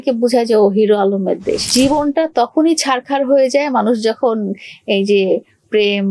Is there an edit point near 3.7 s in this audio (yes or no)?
no